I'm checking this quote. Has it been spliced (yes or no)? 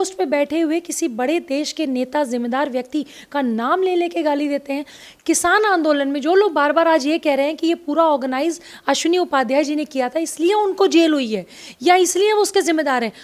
no